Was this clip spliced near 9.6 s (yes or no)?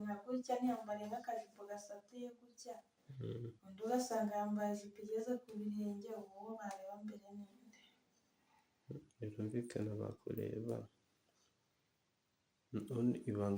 no